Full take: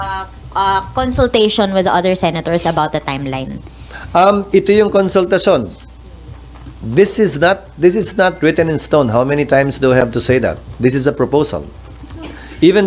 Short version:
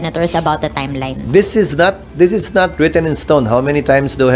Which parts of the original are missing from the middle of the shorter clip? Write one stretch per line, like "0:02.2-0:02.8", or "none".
0:03.5-0:06.8

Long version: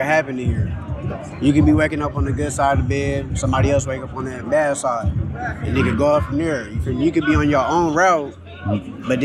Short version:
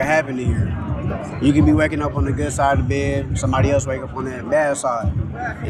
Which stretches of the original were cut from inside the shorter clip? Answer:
none

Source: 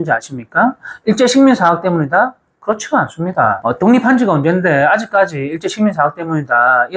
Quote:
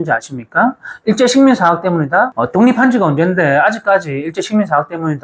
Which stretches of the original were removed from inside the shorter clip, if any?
0:02.4-0:03.7

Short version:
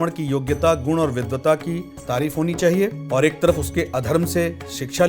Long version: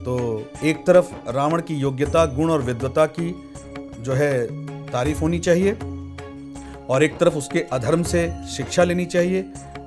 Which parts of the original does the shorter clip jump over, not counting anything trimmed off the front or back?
0:03.4-0:04.8
0:05.8-0:06.8

